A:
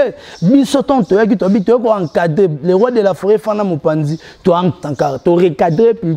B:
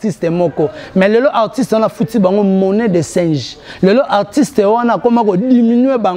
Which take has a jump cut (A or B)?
A